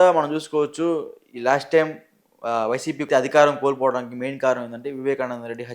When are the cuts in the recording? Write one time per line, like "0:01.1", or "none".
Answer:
0:03.1

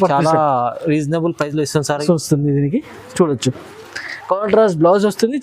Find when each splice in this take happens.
0:02.0

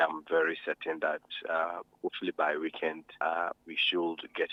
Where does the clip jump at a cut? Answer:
none

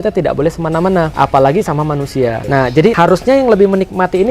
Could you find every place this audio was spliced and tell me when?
0:01.1
0:02.8

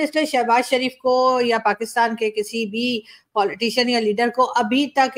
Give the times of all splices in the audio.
none

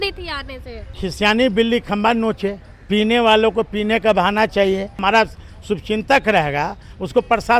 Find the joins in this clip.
0:01.0
0:05.0

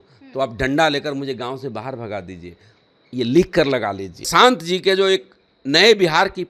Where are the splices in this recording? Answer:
0:04.1

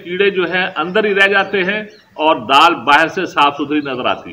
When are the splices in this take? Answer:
none

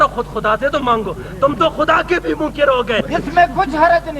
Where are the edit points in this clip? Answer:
0:03.0

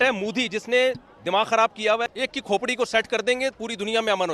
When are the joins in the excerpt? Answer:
0:02.1

